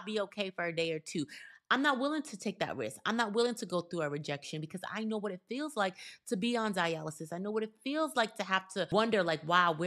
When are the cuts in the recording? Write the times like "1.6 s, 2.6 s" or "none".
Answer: 8.9 s